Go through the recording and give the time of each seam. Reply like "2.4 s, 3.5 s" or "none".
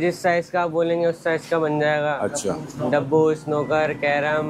none